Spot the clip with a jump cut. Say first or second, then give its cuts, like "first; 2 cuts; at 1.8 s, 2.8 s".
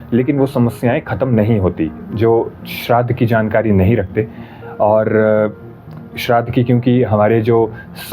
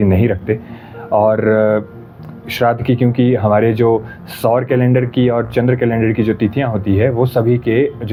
first; 1 cut; at 2.0 s